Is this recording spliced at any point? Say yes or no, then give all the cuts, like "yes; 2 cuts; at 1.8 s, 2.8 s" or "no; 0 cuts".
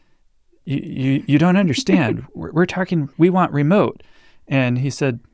no; 0 cuts